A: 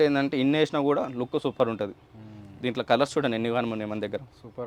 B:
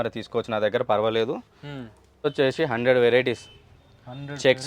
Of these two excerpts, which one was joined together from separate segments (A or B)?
B